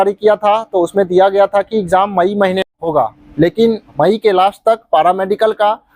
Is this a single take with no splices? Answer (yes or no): no